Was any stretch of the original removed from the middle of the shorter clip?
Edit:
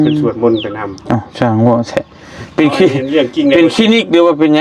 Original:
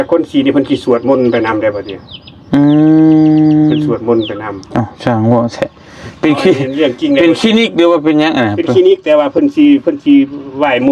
no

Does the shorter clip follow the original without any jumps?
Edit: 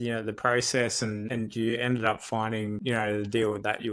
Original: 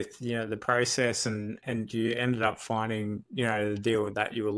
no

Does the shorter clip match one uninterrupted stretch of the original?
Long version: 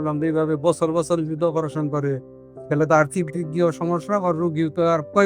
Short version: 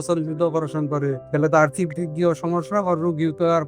no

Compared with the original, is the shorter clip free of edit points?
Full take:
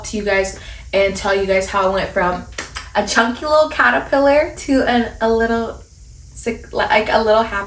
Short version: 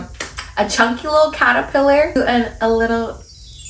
no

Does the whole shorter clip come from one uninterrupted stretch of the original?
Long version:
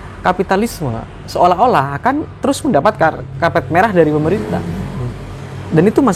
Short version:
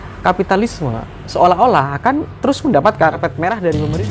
no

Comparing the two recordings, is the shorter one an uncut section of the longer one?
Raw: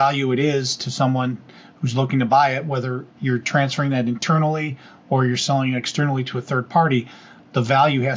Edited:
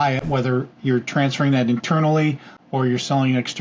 yes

